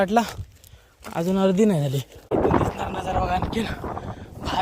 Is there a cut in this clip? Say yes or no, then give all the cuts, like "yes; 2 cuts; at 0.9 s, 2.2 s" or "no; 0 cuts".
yes; 1 cut; at 2.3 s